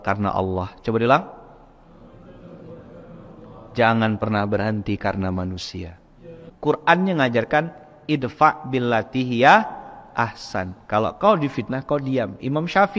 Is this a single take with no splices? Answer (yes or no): no